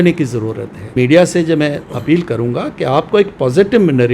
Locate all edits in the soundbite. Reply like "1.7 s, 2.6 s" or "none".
0.9 s